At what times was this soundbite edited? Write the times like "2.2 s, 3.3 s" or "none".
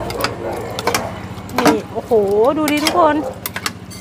none